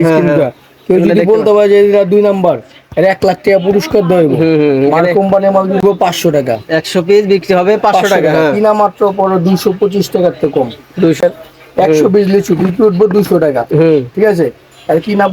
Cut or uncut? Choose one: cut